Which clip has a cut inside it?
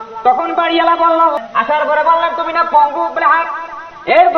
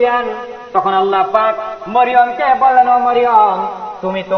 first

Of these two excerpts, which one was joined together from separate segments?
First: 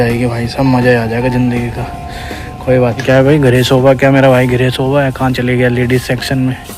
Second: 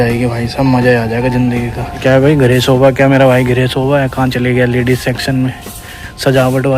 second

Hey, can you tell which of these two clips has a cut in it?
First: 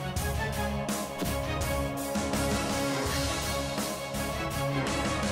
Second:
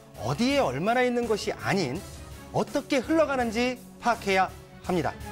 first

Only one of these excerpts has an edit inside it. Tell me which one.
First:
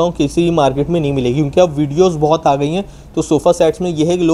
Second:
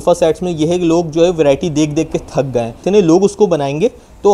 second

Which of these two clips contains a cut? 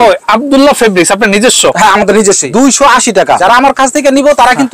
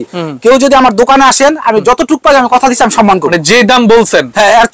first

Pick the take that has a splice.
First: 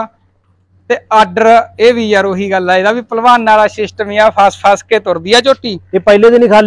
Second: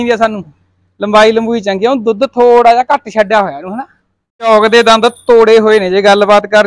second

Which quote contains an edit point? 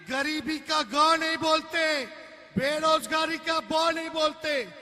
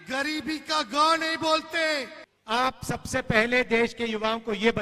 second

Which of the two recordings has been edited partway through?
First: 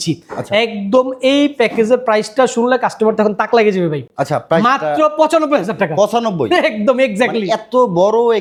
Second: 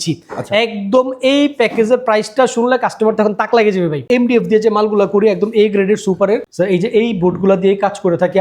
second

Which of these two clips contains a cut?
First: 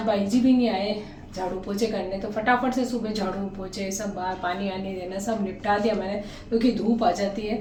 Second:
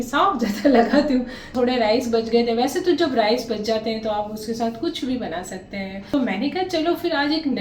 second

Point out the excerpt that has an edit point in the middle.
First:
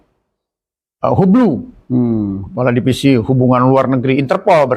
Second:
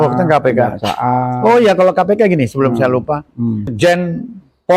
second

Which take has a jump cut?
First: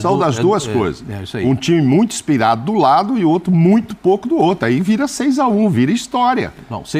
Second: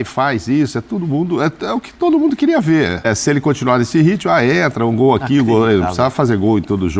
second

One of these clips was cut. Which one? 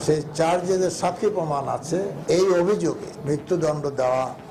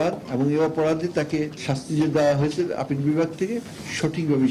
first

